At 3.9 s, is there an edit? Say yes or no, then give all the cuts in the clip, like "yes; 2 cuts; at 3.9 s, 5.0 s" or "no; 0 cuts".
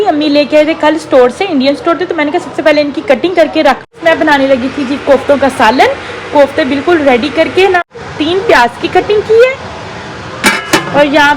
yes; 2 cuts; at 3.9 s, 7.8 s